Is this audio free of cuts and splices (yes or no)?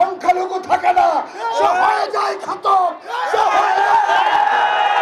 yes